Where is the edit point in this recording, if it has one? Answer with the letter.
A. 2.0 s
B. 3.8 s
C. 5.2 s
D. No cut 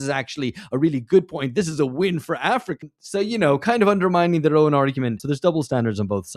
C